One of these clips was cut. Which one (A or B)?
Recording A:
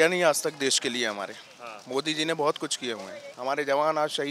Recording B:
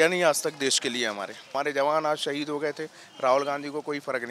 B